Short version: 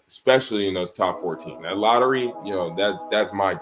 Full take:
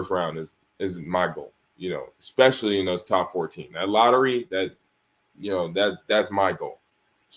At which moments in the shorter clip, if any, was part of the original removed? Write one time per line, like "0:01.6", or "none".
0:02.4

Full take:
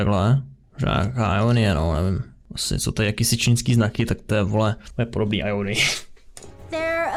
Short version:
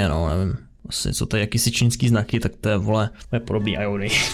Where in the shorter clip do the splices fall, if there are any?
none

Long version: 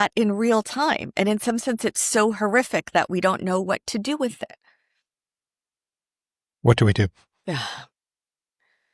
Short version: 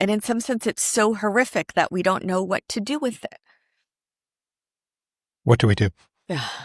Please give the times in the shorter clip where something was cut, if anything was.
none

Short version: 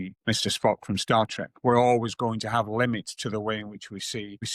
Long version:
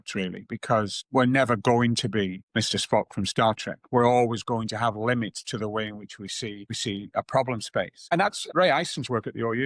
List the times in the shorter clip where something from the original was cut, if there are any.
none

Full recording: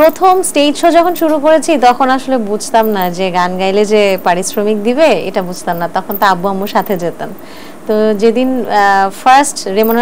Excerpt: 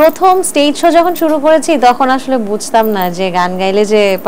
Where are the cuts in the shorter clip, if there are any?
none

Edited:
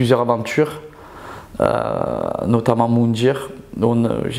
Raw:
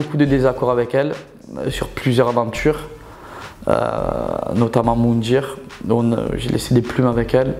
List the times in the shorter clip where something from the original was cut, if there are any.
none

